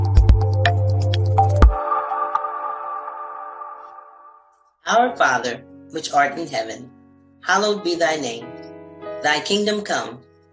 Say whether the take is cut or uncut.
uncut